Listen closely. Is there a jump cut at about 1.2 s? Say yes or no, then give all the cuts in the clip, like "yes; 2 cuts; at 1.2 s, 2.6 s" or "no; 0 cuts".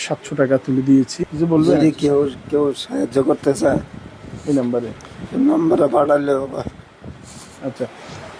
yes; 1 cut; at 1.2 s